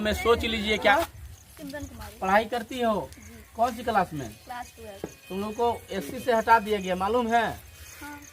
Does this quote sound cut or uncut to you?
cut